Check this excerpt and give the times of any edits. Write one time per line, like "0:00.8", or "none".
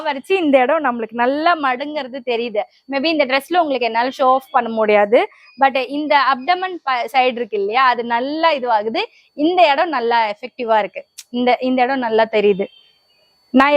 none